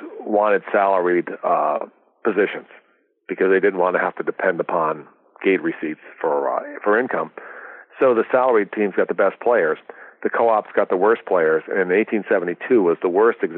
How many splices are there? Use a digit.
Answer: 0